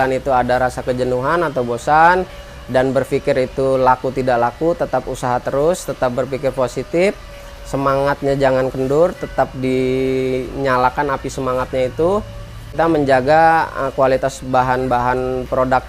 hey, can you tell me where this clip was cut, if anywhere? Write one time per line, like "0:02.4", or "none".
0:12.7